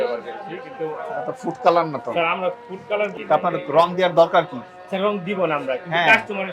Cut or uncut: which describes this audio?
cut